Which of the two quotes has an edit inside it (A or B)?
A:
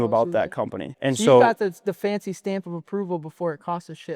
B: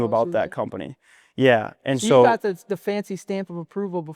A